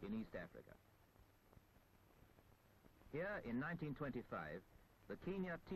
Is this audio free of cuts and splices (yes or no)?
yes